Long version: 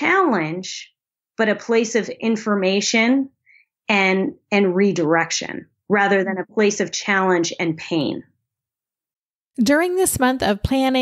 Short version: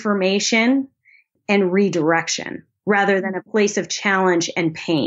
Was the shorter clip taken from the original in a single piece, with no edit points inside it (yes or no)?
no